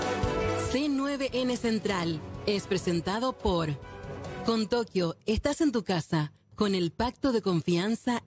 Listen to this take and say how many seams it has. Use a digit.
0